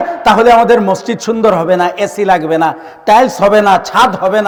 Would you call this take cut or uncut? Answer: uncut